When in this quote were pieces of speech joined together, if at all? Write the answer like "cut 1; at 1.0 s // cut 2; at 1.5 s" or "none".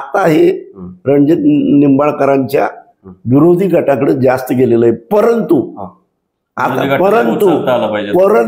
none